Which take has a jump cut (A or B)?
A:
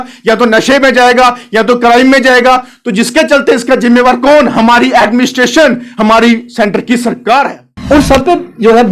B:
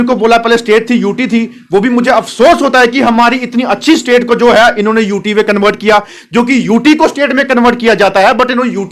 A